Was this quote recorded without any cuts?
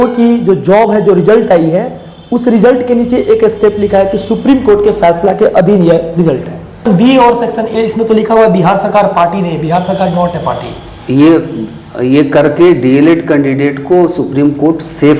no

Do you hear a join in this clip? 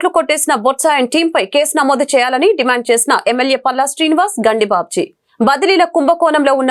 no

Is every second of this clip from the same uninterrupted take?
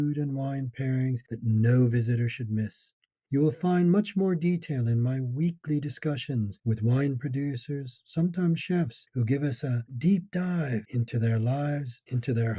yes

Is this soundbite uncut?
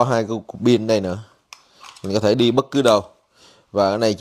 yes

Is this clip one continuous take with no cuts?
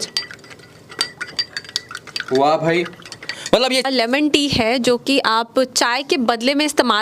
no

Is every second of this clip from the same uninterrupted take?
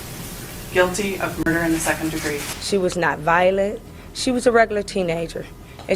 no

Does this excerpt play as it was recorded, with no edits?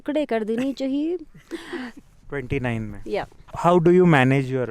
no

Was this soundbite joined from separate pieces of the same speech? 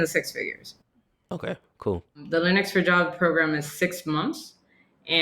yes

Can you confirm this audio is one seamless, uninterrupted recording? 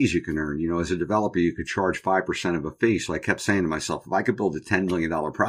yes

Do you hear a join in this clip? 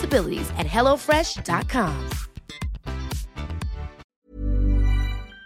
yes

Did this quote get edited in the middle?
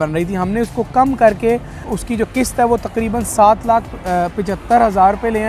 yes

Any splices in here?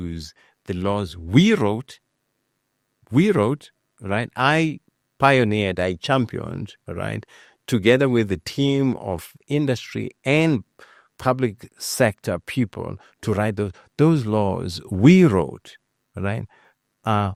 no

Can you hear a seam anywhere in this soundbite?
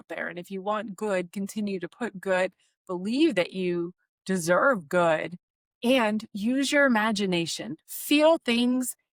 no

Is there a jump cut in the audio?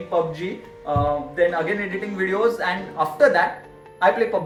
no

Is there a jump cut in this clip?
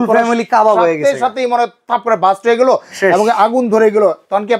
no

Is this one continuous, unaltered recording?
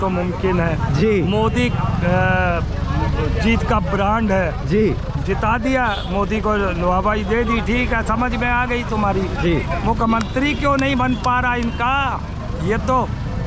yes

